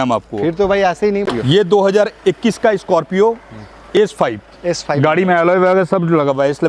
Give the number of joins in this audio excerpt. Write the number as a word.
one